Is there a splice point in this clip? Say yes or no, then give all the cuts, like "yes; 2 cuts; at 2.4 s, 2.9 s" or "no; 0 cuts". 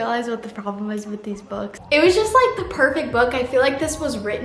yes; 1 cut; at 1.8 s